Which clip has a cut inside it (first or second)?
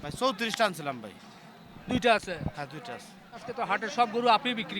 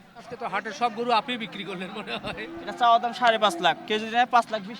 second